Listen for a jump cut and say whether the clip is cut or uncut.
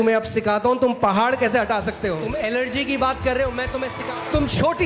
cut